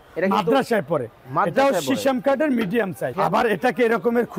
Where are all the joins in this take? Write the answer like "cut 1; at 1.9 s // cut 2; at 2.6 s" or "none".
cut 1; at 3.1 s